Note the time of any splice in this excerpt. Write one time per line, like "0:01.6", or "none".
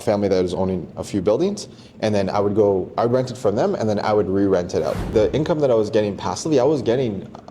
0:05.1